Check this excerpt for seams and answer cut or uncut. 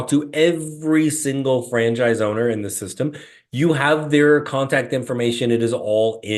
uncut